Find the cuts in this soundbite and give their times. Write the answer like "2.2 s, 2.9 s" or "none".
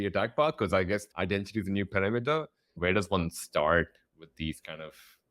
1.1 s, 2.8 s

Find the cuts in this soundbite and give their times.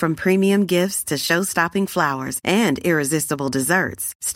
none

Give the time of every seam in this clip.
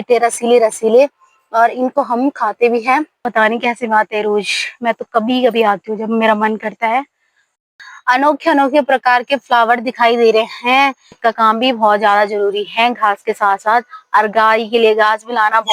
3.3 s, 7.8 s, 11.2 s

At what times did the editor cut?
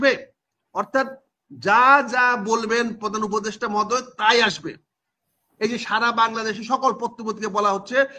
none

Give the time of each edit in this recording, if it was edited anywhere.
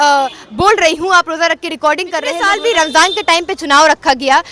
2.4 s

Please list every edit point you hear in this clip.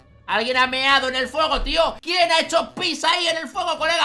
2.0 s

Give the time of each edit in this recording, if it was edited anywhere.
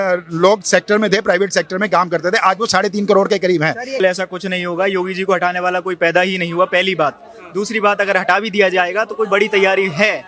4.0 s

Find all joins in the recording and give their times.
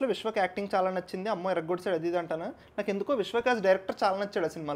none

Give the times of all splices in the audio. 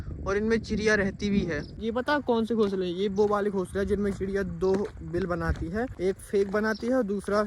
1.8 s, 5.9 s

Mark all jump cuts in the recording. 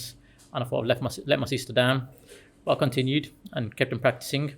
none

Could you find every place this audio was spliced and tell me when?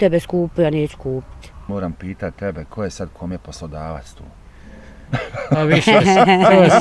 1.6 s

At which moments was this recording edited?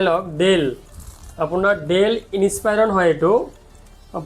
none

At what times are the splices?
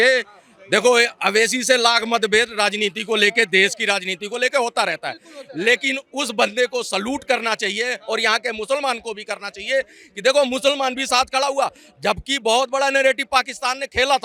none

